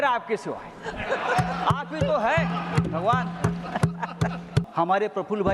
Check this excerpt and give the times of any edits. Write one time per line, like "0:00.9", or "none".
0:04.6